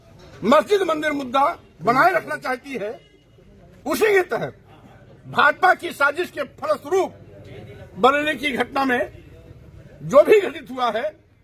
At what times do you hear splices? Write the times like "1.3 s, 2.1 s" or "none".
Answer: none